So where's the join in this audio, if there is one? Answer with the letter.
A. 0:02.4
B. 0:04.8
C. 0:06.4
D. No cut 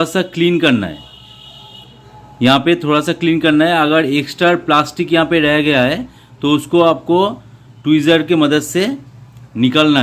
D